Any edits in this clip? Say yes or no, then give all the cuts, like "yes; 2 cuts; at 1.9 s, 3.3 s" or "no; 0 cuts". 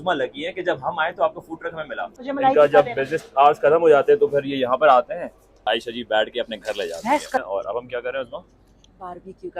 yes; 3 cuts; at 2.1 s, 5.6 s, 7.4 s